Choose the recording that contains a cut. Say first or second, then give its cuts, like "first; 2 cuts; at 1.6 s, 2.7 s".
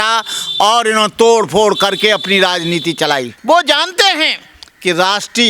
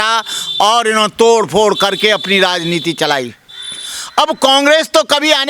first; 1 cut; at 3.3 s